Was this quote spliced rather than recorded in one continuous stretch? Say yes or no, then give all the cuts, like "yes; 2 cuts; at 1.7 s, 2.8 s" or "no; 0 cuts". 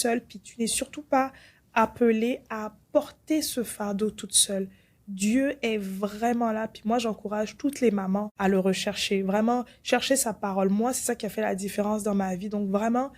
yes; 1 cut; at 8.3 s